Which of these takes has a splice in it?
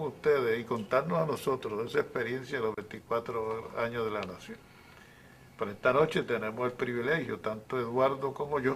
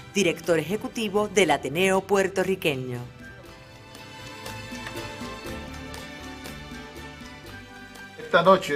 first; 1 cut; at 6.9 s

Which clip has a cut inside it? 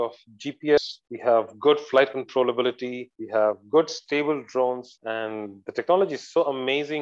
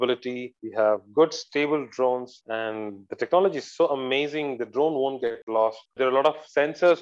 second; 1 cut; at 5.9 s

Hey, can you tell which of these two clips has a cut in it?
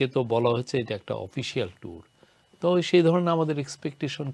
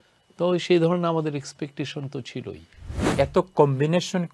second; 1 cut; at 3.1 s

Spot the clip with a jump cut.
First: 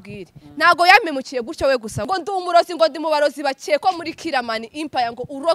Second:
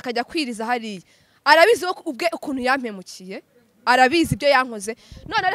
first; 1 cut; at 2.1 s

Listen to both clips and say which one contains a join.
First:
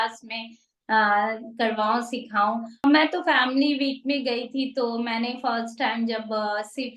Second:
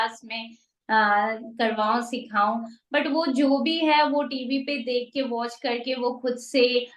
first; 1 cut; at 2.8 s

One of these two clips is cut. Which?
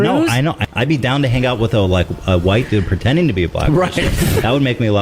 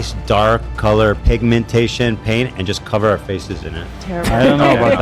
second; 1 cut; at 1.2 s

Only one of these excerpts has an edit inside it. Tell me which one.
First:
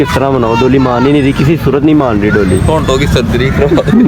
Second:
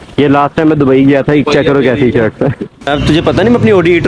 second; 1 cut; at 2.9 s

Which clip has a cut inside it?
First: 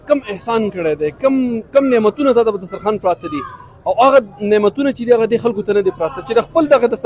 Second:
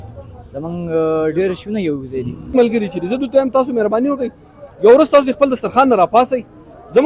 second; 1 cut; at 2.5 s

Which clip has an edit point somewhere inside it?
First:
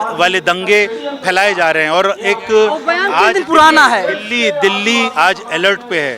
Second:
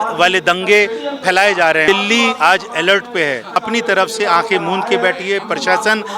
second; 2 cuts; at 1.8 s, 3.6 s

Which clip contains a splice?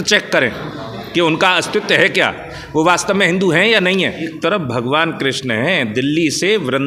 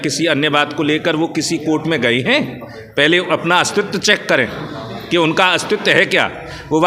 first; 1 cut; at 4.3 s

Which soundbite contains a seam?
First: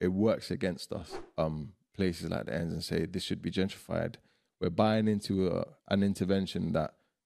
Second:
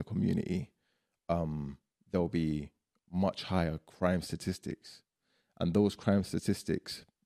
first; 1 cut; at 1.2 s

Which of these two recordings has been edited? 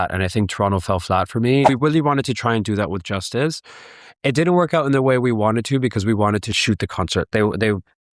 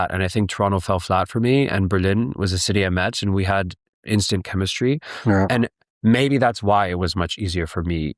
first; 2 cuts; at 1.7 s, 6.5 s

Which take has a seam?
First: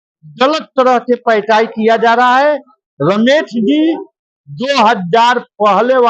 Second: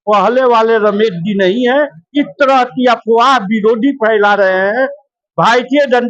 second; 1 cut; at 2.0 s

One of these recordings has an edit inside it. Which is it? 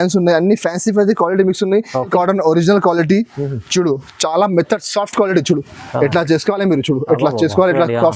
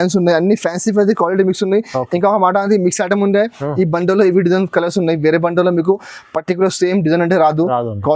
first; 1 cut; at 2.1 s

